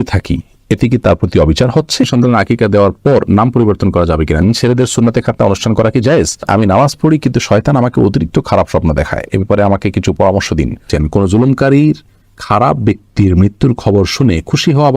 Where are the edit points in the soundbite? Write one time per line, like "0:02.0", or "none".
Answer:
0:02.1
0:04.4
0:06.5
0:10.8